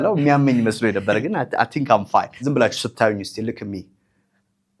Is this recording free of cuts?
no; 1 cut; at 2.3 s

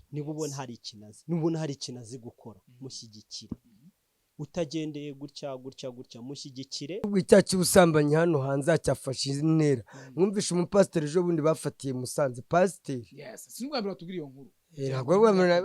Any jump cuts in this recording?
yes; 1 cut; at 7.2 s

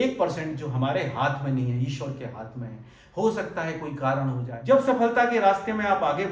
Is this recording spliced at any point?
yes; 1 cut; at 4.5 s

